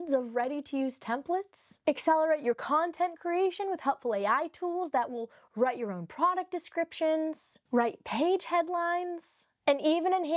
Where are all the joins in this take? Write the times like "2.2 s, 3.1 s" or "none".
none